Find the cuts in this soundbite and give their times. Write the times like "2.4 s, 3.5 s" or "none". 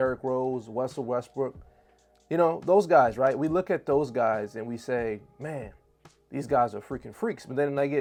none